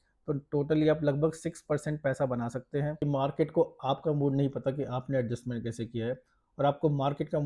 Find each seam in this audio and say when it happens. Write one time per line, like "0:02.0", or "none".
0:03.0